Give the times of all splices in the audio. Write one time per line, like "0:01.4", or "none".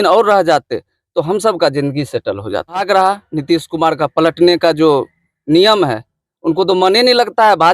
0:02.8